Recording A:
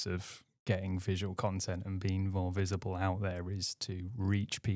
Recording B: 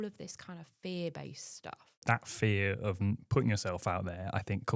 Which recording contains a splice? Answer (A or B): B